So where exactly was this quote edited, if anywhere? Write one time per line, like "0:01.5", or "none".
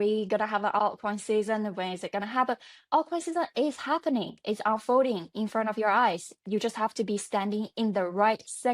0:06.4